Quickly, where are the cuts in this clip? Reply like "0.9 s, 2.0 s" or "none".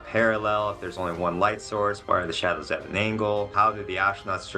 2.0 s, 3.5 s